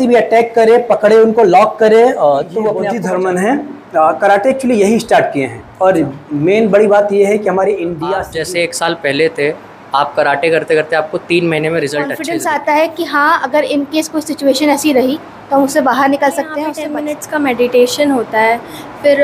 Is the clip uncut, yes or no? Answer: no